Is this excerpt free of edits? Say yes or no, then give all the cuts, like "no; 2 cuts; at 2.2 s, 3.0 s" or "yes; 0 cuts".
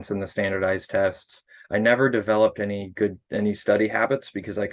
yes; 0 cuts